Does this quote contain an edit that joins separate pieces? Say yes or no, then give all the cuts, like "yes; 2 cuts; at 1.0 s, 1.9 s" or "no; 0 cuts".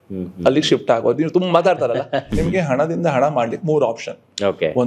yes; 1 cut; at 2.3 s